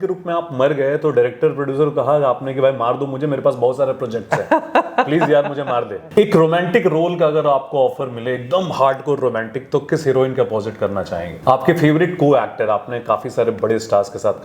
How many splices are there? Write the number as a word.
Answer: two